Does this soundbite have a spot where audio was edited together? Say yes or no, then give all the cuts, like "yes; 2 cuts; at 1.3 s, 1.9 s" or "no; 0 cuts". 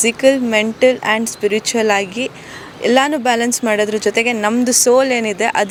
no; 0 cuts